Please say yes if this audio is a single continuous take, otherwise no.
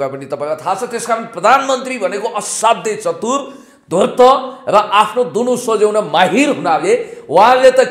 yes